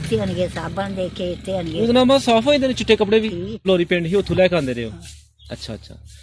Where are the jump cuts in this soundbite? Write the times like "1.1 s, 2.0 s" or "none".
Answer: 3.5 s